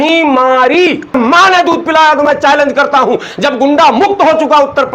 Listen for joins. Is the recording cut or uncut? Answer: cut